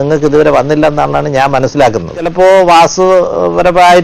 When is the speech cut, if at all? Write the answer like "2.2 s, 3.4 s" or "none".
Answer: 2.2 s